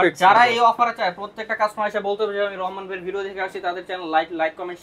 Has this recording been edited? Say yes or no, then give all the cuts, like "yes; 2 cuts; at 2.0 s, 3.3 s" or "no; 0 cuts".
no; 0 cuts